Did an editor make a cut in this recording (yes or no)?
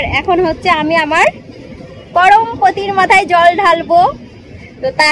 no